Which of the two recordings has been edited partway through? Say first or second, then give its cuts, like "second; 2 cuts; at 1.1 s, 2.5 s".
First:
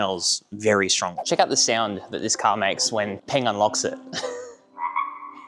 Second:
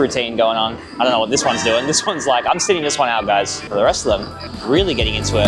first; 1 cut; at 1.2 s